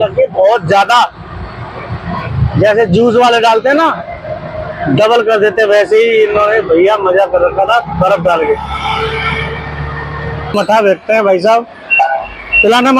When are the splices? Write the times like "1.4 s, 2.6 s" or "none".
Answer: 10.5 s